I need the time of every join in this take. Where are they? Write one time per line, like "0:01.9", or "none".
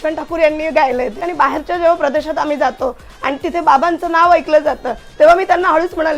0:01.2